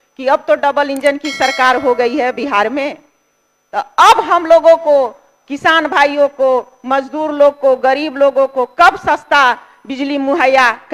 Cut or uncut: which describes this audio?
uncut